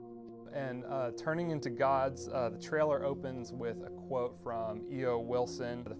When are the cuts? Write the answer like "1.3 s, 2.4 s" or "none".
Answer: none